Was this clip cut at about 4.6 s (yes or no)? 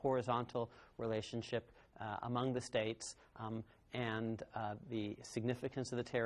no